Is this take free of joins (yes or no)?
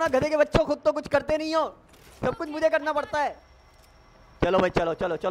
yes